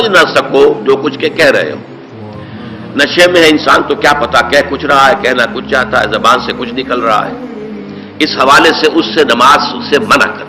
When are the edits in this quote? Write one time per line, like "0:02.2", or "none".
none